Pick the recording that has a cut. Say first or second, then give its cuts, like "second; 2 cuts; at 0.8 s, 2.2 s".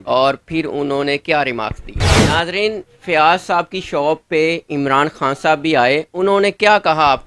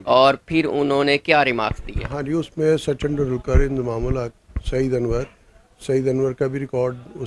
first; 1 cut; at 2.2 s